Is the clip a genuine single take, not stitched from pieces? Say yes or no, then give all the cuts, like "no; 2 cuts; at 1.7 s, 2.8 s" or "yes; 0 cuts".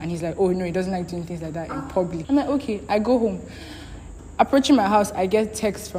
no; 1 cut; at 2.2 s